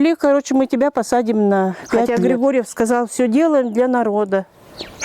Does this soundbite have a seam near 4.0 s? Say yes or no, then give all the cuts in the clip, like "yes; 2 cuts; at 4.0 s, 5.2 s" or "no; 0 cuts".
no; 1 cut; at 2.1 s